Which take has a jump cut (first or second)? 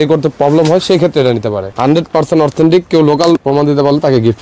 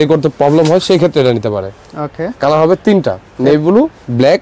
first